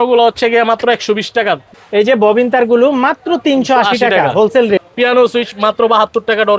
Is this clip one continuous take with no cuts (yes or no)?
no